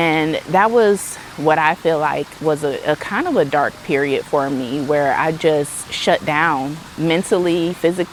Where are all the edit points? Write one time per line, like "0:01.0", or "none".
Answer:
none